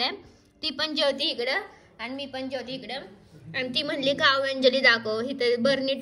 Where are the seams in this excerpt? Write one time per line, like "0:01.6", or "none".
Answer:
none